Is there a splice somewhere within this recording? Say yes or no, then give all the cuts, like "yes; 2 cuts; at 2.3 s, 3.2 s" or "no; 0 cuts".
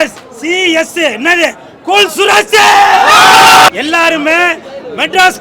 yes; 1 cut; at 3.7 s